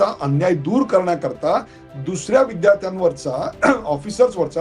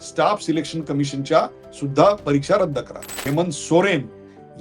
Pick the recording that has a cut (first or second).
second